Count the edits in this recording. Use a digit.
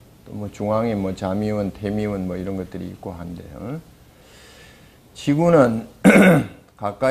1